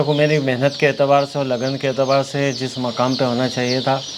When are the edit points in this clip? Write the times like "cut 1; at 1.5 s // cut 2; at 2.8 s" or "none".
none